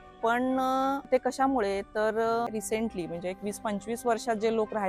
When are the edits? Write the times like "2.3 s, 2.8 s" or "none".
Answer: 1.1 s, 2.6 s